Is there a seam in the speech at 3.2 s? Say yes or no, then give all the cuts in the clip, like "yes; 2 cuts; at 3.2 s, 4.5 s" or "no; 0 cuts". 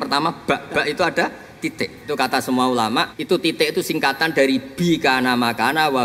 yes; 2 cuts; at 1.6 s, 3.2 s